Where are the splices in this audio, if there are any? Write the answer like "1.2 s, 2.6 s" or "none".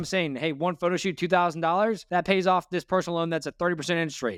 none